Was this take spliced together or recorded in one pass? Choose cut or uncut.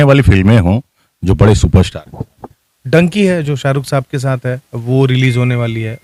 uncut